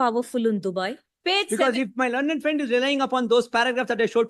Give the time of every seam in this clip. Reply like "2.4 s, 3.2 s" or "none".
1.1 s